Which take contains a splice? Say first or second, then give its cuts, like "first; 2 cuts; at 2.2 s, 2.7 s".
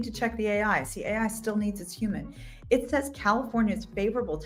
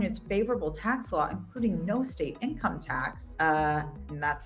second; 1 cut; at 3.2 s